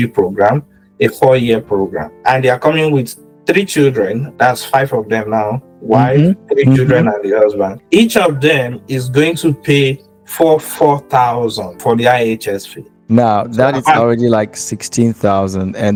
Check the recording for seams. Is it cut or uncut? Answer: uncut